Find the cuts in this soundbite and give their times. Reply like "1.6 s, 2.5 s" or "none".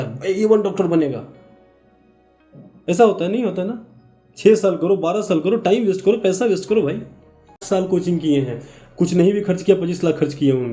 7.6 s